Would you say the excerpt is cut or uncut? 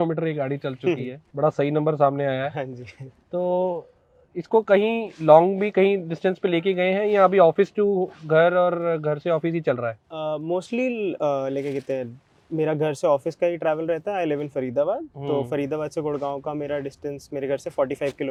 uncut